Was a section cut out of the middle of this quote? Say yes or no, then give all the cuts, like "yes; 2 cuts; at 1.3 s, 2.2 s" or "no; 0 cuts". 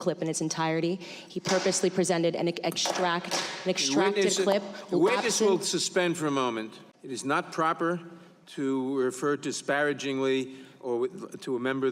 no; 0 cuts